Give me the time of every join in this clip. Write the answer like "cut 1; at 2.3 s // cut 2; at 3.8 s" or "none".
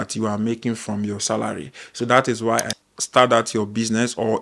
cut 1; at 2.8 s